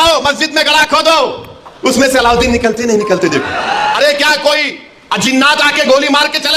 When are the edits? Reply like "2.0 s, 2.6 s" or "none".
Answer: 3.9 s